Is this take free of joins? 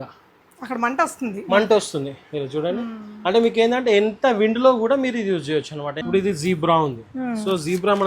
no; 1 cut; at 5.9 s

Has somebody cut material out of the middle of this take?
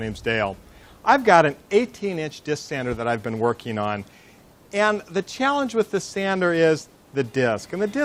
yes; 1 cut; at 1.0 s

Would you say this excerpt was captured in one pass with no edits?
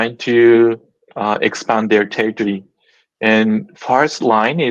yes; 0 cuts

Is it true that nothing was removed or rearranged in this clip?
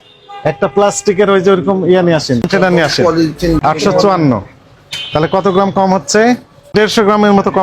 no; 3 cuts; at 2.5 s, 3.6 s, 6.7 s

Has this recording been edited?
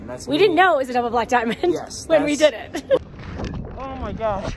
yes; 1 cut; at 3.0 s

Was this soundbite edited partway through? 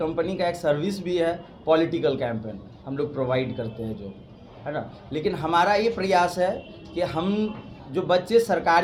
no; 0 cuts

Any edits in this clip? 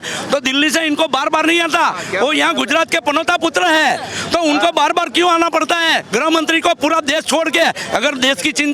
no; 0 cuts

